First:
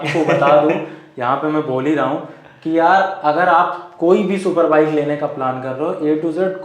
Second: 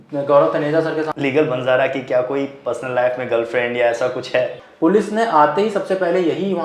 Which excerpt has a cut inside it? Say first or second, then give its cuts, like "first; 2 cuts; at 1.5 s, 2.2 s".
second; 2 cuts; at 1.1 s, 4.6 s